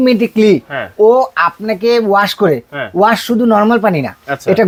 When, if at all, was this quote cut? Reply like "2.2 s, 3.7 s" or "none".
none